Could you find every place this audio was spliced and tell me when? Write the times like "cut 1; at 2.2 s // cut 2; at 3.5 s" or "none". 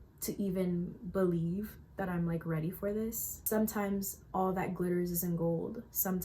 cut 1; at 3.3 s